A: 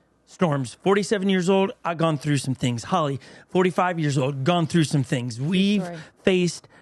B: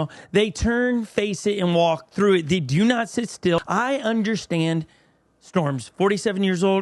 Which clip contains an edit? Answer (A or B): B